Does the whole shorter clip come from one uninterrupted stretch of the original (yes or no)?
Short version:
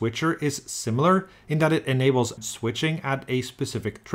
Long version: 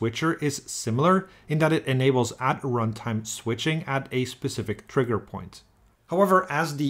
no